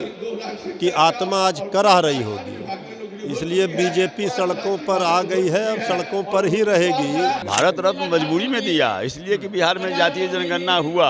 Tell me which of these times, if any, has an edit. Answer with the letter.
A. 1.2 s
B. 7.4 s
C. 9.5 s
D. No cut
B